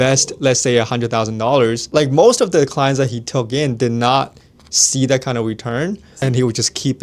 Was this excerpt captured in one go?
no; 2 cuts; at 1.8 s, 6.1 s

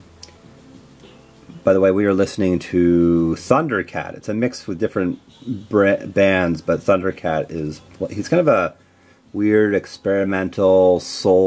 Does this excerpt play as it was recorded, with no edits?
no; 1 cut; at 2.6 s

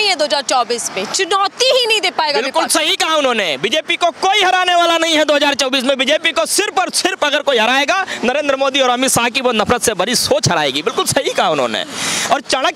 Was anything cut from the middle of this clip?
no; 0 cuts

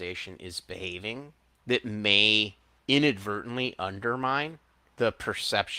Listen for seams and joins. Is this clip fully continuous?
no; 3 cuts; at 1.4 s, 2.7 s, 4.8 s

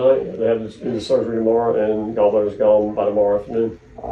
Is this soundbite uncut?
yes; 0 cuts

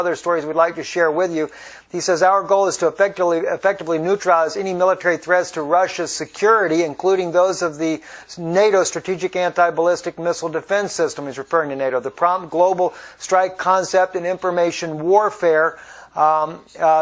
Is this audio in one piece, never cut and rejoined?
yes; 0 cuts

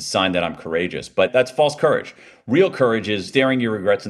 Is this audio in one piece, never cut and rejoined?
no; 2 cuts; at 1.3 s, 3.3 s

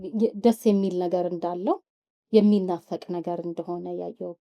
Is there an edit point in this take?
no; 0 cuts

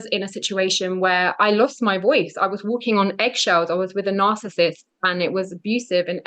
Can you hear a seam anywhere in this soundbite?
no; 0 cuts

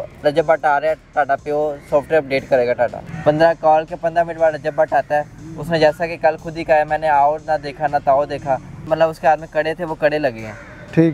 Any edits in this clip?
yes; 2 cuts; at 3.0 s, 8.9 s

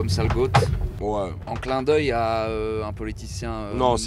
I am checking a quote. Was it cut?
yes; 1 cut; at 1.0 s

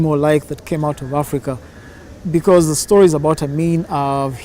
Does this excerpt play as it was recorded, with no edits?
yes; 0 cuts

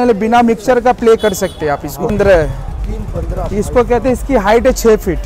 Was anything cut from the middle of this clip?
yes; 1 cut; at 2.1 s

